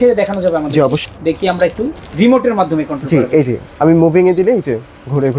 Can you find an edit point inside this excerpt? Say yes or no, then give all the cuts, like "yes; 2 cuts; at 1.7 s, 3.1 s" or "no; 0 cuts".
yes; 1 cut; at 1.0 s